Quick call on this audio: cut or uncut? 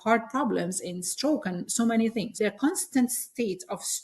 cut